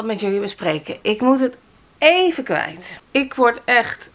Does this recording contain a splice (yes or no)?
no